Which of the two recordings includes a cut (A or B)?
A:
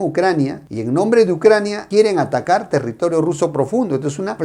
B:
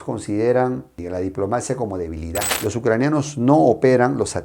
B